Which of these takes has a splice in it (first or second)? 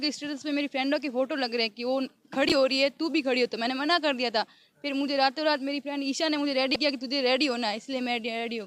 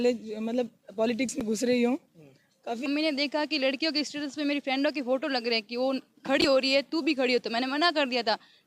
second